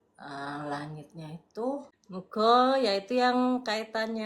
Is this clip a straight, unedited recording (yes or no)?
no